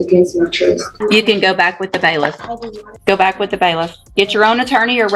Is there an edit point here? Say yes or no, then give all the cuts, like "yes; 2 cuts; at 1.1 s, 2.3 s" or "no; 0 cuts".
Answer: yes; 2 cuts; at 0.9 s, 3.0 s